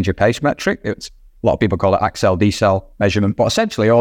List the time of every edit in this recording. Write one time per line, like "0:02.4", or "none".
none